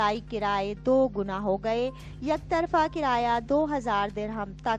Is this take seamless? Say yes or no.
yes